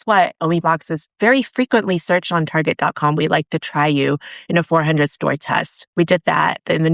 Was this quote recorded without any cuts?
yes; 0 cuts

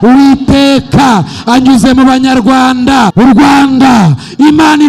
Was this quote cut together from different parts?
yes; 1 cut; at 3.1 s

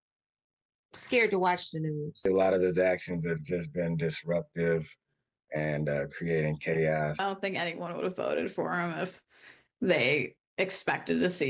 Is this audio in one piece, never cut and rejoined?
yes; 0 cuts

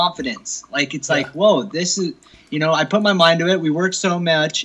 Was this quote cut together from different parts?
no; 0 cuts

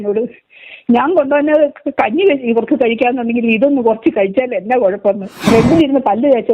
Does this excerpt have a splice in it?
yes; 1 cut; at 5.4 s

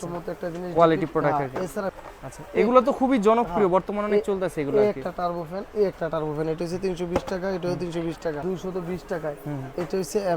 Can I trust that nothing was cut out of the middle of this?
no; 2 cuts; at 1.9 s, 8.4 s

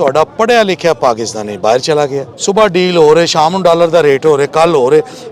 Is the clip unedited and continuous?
no; 1 cut; at 2.3 s

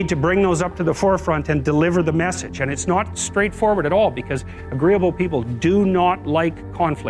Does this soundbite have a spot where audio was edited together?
no; 0 cuts

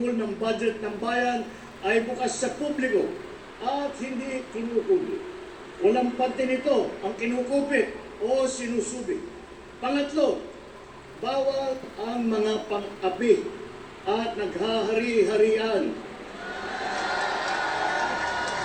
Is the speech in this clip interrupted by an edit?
no; 0 cuts

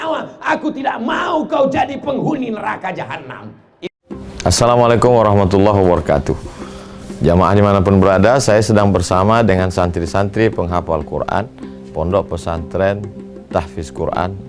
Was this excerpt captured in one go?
no; 1 cut; at 3.7 s

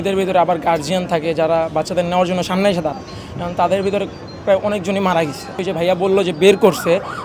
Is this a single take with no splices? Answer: no; 1 cut; at 5.6 s

